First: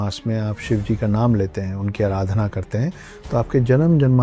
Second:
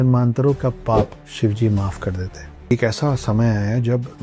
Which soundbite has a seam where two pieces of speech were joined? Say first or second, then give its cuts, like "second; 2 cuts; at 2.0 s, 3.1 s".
second; 2 cuts; at 1.2 s, 2.7 s